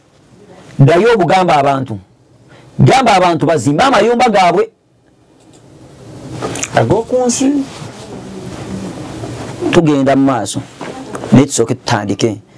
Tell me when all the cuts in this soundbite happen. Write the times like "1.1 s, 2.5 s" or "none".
none